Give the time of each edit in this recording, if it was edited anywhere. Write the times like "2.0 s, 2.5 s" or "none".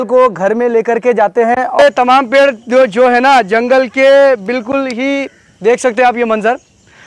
1.8 s